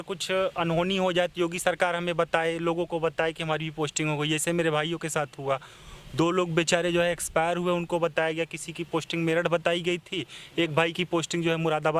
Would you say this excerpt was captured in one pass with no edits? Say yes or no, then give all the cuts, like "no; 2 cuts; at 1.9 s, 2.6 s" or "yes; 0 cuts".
yes; 0 cuts